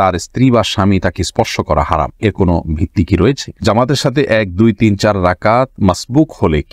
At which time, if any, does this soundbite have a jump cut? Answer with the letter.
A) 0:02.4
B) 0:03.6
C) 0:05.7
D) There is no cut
B